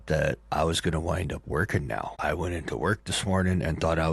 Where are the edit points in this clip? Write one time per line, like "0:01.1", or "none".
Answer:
0:02.1